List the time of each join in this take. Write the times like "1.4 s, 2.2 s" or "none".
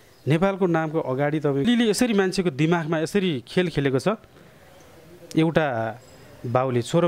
1.6 s

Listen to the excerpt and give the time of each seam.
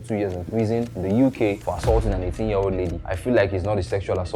0.9 s, 1.6 s, 3.1 s

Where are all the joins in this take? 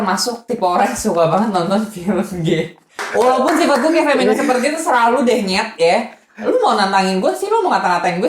3.1 s

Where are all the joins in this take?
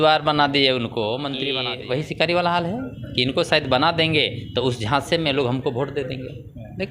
1.5 s

